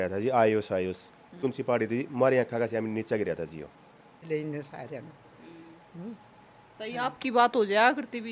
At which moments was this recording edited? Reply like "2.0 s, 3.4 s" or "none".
1.4 s, 4.2 s